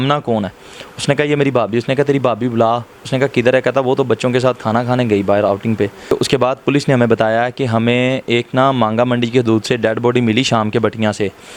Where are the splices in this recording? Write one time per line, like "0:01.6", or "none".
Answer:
0:06.1